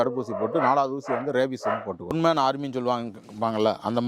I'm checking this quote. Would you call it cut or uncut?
cut